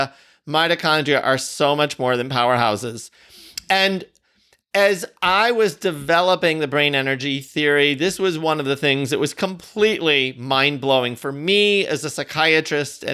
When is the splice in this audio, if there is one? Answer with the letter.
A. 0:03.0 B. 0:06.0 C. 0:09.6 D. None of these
D